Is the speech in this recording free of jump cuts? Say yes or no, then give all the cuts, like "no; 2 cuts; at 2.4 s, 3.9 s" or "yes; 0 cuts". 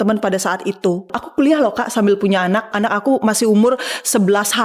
no; 2 cuts; at 1.2 s, 2.7 s